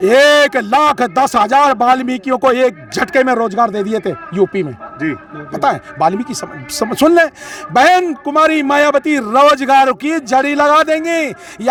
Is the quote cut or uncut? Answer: uncut